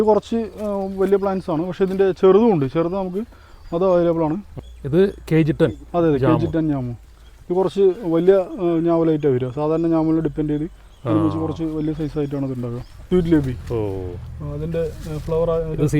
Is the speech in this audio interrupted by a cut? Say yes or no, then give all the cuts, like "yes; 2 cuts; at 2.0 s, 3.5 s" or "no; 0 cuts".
yes; 2 cuts; at 4.5 s, 13.0 s